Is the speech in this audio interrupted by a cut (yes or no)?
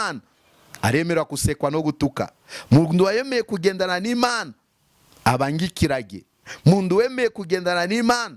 no